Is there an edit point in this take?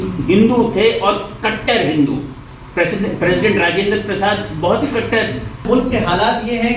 yes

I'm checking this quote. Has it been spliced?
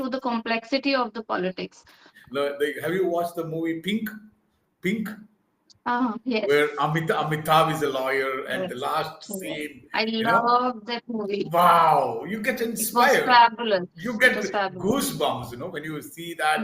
yes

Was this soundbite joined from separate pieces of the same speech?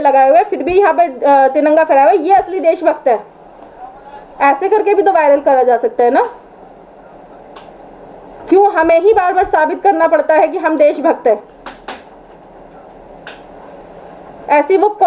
no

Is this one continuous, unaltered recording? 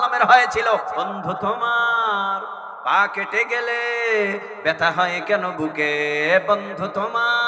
no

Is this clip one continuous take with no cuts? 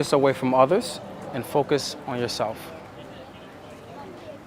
yes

